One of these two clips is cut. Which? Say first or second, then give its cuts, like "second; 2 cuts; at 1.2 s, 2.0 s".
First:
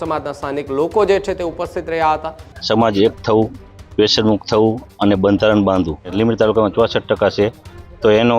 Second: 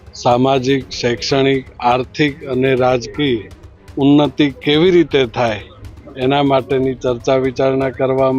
first; 2 cuts; at 2.6 s, 6.1 s